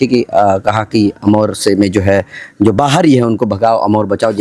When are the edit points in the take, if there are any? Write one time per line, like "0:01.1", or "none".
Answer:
none